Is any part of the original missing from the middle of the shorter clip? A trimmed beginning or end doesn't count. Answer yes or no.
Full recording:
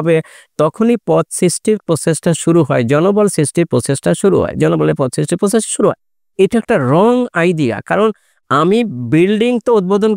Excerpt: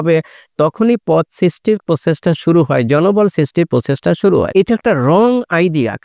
yes